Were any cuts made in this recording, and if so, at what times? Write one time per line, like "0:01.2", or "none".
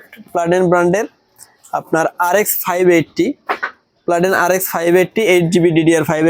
none